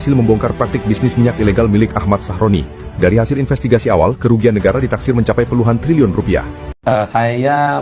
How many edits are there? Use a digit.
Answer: 1